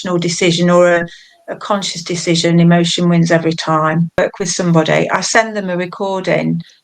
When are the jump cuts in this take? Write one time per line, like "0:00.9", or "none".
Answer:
0:04.2

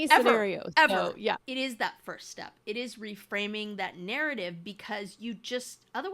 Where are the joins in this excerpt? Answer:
0:01.4

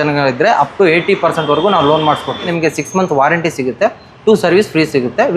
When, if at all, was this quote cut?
0:02.5

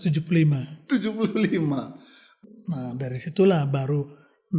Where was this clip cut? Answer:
0:02.4

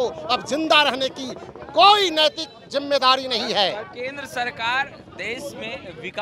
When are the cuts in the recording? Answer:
none

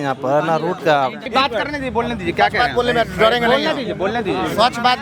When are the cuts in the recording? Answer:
0:01.2

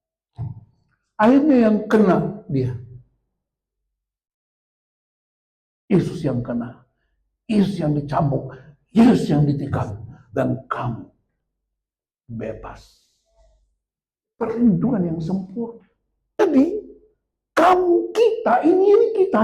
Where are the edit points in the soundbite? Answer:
0:16.4

